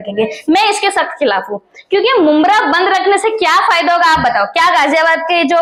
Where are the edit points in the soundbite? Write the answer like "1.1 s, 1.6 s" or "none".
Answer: none